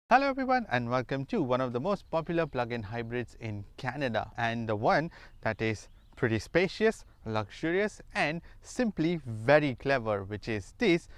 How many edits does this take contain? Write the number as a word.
one